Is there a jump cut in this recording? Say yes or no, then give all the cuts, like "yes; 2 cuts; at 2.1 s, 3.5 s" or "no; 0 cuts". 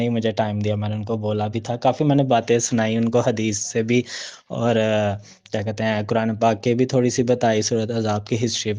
no; 0 cuts